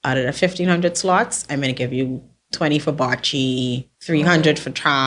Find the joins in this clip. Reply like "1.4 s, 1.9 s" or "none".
3.9 s